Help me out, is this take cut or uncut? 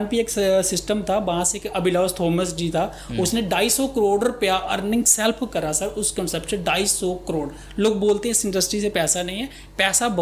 uncut